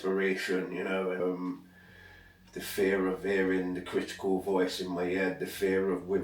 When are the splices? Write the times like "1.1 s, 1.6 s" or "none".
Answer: 1.2 s